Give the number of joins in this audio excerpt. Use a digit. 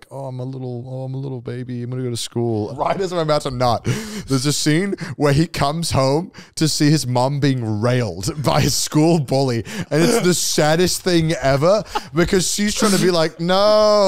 1